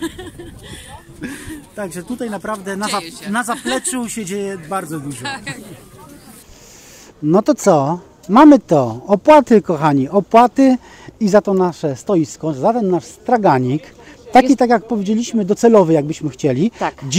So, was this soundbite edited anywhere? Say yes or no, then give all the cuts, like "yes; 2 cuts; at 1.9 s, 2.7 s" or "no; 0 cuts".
yes; 1 cut; at 6.5 s